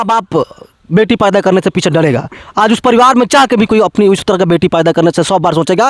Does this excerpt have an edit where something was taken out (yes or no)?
no